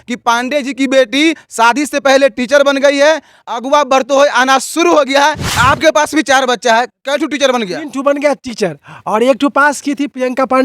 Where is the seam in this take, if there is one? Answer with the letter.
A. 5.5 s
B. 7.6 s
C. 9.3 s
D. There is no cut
A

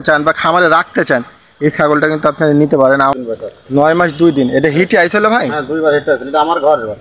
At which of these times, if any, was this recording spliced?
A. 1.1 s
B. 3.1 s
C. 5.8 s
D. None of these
B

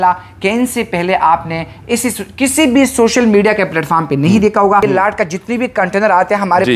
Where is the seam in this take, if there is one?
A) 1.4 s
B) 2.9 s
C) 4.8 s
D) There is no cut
C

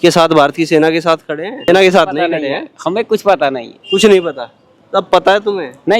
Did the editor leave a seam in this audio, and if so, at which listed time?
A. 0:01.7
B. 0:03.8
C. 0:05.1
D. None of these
A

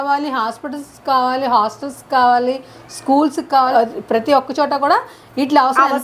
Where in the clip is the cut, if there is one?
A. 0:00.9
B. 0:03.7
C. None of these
B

